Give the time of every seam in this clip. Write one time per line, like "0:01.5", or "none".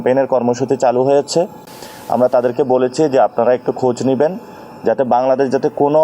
none

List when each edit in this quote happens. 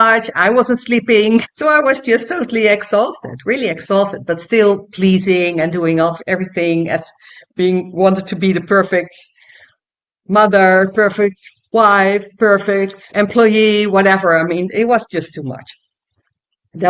none

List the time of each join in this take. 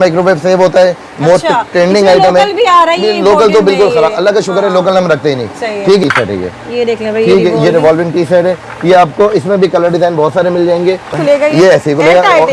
0:06.0
0:11.2

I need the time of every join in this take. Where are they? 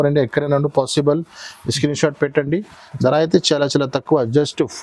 none

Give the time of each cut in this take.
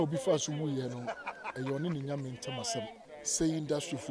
0:03.0

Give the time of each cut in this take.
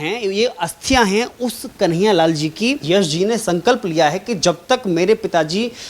0:02.8

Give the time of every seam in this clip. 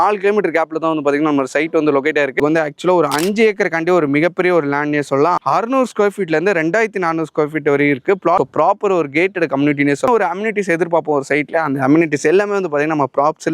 0:02.4
0:05.4
0:08.4
0:10.1

